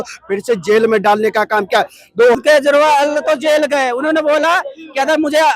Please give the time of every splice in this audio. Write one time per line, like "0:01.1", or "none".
0:02.3